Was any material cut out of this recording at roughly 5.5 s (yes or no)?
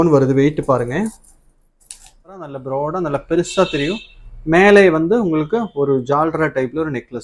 no